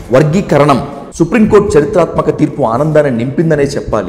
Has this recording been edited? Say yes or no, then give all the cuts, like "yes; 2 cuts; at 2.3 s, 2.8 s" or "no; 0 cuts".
yes; 1 cut; at 1.0 s